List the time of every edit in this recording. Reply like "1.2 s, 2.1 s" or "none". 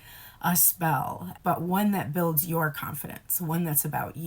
1.3 s